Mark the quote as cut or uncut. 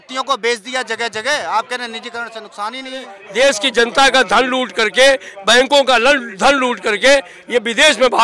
cut